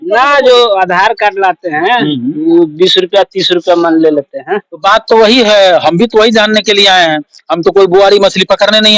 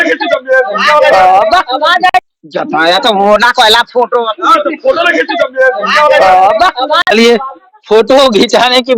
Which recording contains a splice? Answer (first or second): second